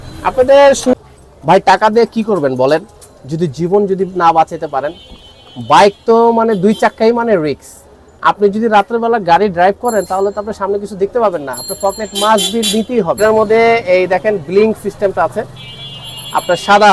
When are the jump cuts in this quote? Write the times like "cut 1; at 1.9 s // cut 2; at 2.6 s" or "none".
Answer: cut 1; at 0.9 s // cut 2; at 13.2 s